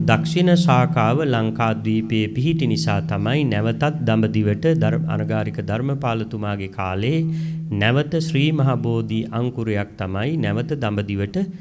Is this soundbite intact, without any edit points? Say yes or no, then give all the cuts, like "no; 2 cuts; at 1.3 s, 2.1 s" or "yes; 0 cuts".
yes; 0 cuts